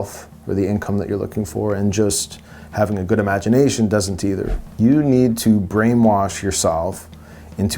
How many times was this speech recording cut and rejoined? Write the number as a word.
one